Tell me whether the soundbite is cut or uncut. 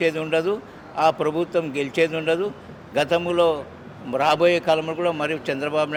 uncut